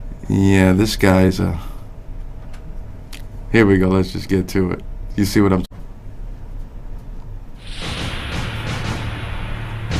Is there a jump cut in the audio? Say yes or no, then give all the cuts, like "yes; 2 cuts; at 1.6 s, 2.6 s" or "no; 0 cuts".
no; 0 cuts